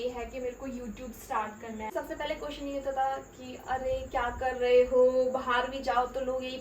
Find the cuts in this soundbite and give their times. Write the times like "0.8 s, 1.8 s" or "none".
1.9 s